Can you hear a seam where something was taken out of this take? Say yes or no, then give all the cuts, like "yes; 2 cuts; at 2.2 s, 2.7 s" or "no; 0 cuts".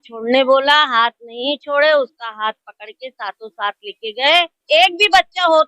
yes; 1 cut; at 4.6 s